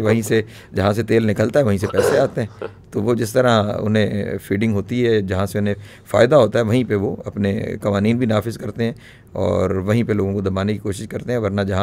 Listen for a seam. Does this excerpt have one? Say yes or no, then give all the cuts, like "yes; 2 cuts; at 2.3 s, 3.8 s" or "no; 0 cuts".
no; 0 cuts